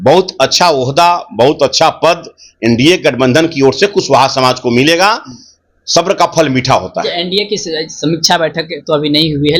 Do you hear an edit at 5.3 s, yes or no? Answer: no